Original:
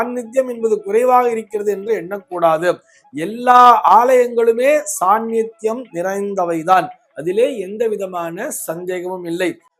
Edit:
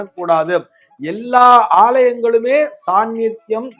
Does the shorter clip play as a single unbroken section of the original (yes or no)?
yes